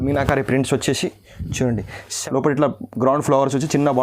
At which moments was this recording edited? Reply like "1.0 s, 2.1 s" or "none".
2.1 s